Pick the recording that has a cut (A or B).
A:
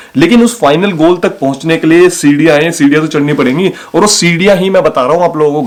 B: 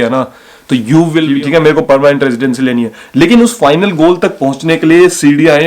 B